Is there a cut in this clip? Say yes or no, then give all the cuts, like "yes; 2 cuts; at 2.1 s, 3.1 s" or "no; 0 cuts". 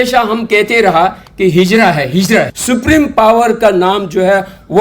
yes; 1 cut; at 2.5 s